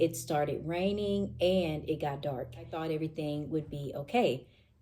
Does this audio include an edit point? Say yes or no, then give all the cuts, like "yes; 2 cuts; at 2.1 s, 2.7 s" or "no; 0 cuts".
yes; 1 cut; at 2.7 s